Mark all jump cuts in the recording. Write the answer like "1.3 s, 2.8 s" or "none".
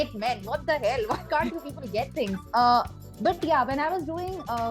none

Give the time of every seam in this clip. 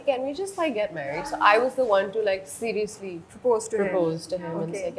none

